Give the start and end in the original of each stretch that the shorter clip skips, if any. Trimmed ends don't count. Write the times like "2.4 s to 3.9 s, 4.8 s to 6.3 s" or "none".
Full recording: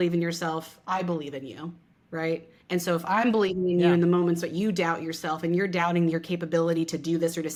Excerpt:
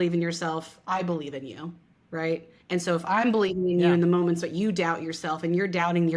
none